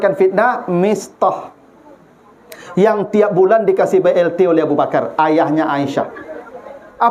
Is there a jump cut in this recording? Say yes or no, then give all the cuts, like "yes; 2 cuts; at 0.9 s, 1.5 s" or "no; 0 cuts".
no; 0 cuts